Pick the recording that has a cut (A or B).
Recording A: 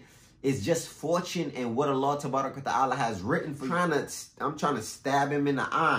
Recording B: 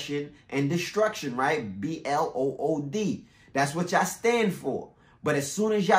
A